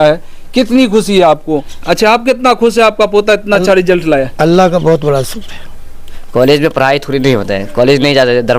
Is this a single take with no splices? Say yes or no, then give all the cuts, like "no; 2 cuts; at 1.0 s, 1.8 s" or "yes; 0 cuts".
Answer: no; 2 cuts; at 1.7 s, 6.0 s